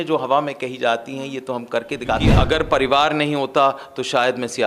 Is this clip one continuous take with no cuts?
no; 1 cut; at 2.3 s

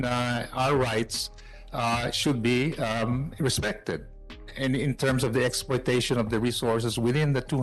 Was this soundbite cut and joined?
no; 0 cuts

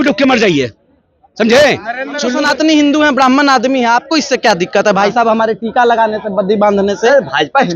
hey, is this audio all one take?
no; 1 cut; at 2.3 s

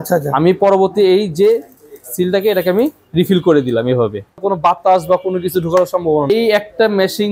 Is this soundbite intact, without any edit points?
no; 2 cuts; at 4.4 s, 6.3 s

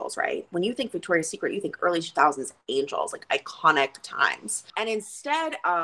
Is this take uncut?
no; 1 cut; at 4.7 s

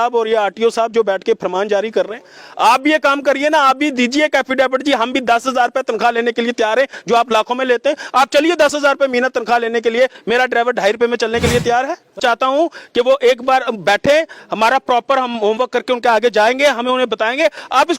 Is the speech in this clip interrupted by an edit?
yes; 1 cut; at 12.2 s

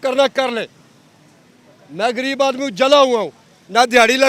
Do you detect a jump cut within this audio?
no; 0 cuts

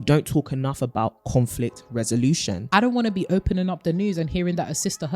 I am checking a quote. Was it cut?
yes; 1 cut; at 2.6 s

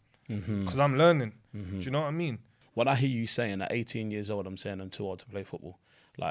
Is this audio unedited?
no; 1 cut; at 2.6 s

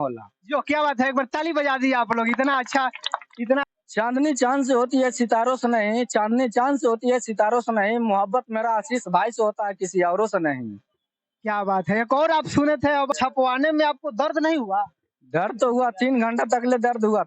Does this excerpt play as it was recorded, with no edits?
no; 2 cuts; at 3.6 s, 13.2 s

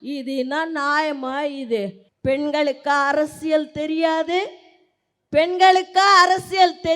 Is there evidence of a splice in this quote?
yes; 1 cut; at 2.0 s

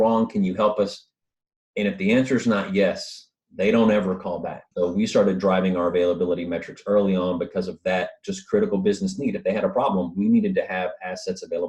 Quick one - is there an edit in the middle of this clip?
yes; 1 cut; at 4.6 s

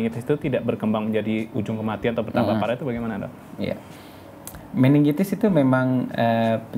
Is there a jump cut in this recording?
no; 0 cuts

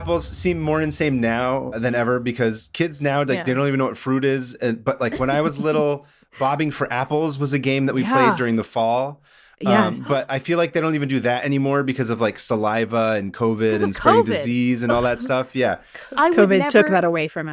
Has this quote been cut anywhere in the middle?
yes; 1 cut; at 1.8 s

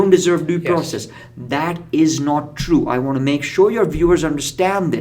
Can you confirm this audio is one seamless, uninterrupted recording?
yes; 0 cuts

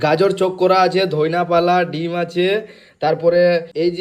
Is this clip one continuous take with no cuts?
yes; 0 cuts

